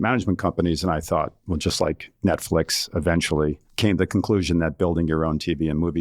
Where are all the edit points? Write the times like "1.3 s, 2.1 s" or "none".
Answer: 1.4 s, 3.7 s